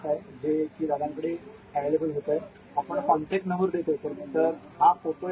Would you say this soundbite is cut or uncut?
uncut